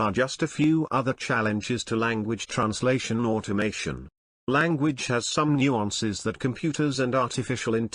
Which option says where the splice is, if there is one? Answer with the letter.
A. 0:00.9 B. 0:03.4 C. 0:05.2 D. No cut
D